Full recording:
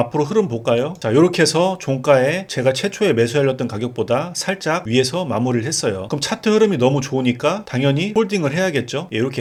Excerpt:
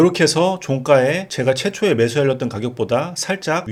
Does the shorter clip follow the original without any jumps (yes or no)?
yes